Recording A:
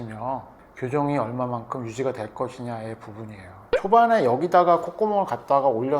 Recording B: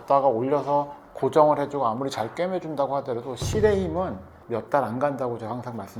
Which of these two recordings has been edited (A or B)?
A